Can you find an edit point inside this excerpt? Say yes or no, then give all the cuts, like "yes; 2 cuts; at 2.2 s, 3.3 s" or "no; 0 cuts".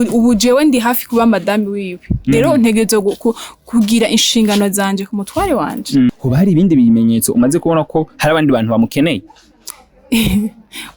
yes; 1 cut; at 6.1 s